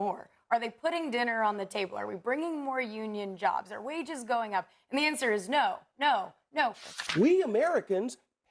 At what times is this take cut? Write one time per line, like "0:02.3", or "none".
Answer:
0:06.9